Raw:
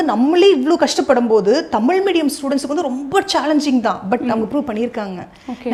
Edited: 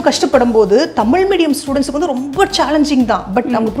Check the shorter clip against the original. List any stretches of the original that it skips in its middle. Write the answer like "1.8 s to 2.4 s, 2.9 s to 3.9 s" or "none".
none